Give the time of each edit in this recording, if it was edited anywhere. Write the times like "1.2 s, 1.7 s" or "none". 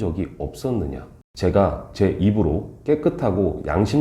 none

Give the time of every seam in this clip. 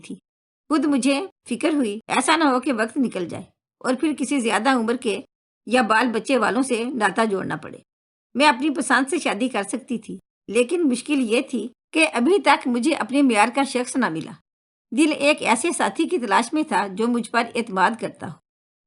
2.0 s

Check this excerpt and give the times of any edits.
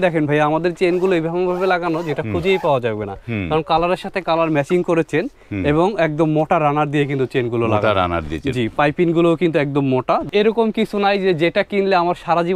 10.2 s

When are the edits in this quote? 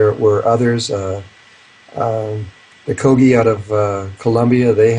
2.3 s

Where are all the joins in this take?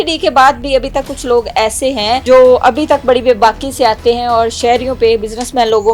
2.2 s

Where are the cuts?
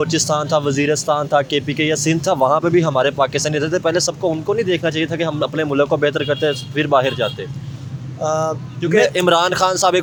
none

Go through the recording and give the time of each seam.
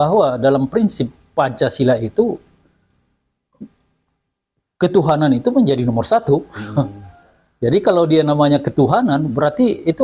none

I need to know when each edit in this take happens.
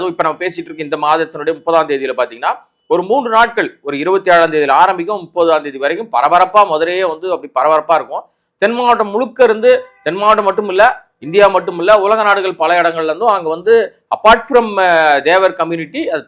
none

